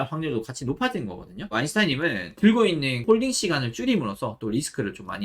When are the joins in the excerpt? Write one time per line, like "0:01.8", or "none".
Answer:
0:01.5
0:03.0